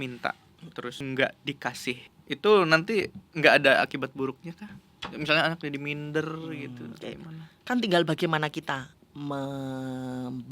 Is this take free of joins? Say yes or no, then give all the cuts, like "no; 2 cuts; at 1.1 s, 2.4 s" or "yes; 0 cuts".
no; 2 cuts; at 1.0 s, 2.1 s